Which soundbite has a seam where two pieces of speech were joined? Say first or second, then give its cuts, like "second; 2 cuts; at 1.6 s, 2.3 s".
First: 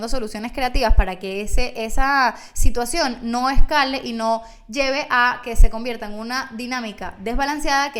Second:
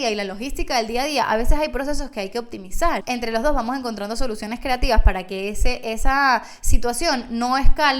second; 1 cut; at 3.0 s